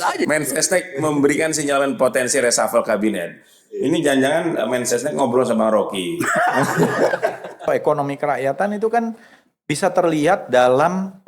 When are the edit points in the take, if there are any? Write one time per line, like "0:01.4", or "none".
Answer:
0:07.7